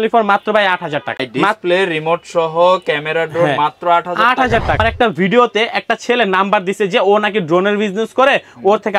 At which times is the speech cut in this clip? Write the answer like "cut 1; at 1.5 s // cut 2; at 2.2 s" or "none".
cut 1; at 1.3 s // cut 2; at 4.8 s